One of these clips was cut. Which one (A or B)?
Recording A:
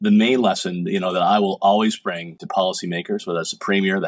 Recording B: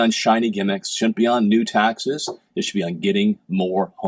A